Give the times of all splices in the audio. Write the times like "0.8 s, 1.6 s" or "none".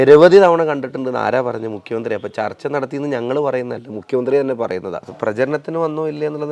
5.1 s